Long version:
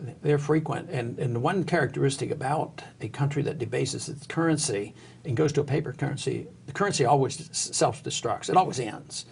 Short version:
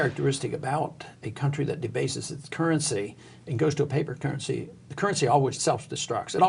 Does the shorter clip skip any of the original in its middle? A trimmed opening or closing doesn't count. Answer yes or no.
yes